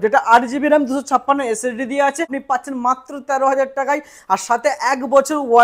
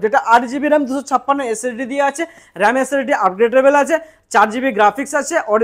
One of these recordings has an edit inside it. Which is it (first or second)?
first